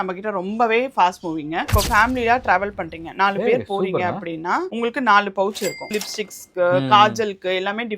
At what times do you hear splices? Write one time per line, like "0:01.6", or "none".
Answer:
0:01.7
0:05.9